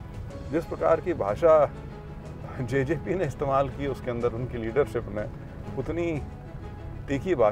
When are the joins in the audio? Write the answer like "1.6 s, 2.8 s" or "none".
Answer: none